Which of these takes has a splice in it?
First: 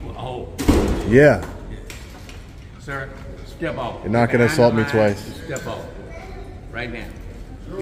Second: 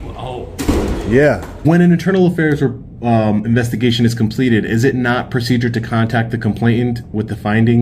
second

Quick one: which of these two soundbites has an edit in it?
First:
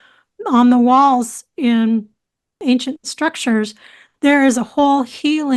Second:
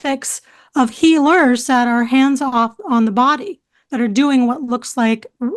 first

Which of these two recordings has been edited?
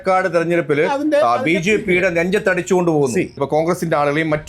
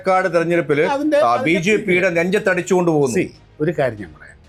first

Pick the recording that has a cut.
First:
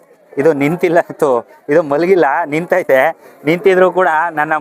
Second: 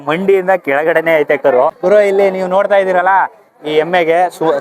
second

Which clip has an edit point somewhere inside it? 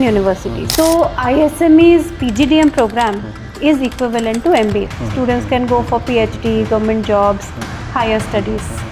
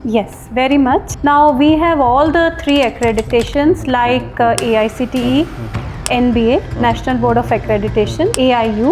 second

